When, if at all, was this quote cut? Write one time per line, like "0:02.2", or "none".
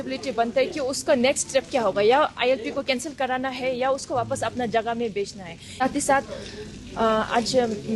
0:05.8